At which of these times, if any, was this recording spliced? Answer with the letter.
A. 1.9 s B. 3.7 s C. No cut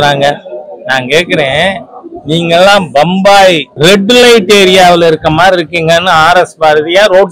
B